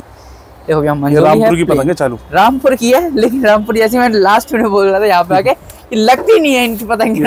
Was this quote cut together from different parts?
no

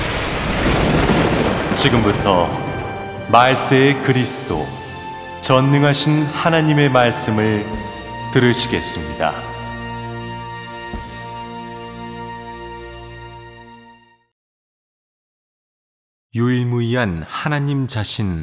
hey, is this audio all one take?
yes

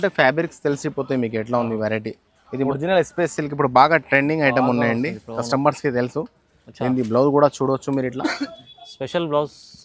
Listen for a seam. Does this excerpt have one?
yes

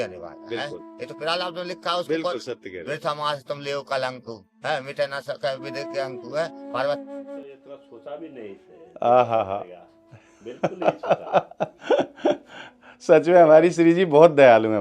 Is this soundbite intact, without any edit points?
no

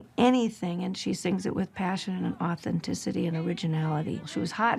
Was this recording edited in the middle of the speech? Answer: no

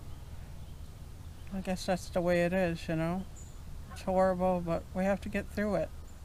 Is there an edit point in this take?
no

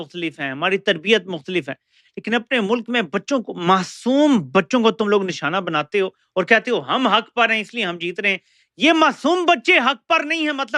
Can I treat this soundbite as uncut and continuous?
yes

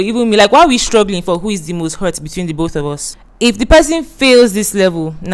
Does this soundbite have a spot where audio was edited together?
no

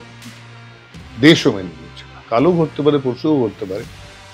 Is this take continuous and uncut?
no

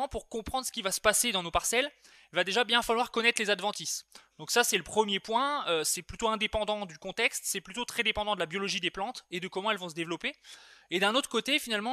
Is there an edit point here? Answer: no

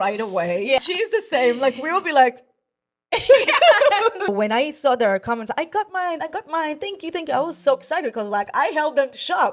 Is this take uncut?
no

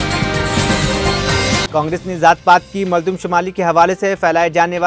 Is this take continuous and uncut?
no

